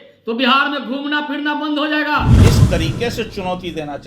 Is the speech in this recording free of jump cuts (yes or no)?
no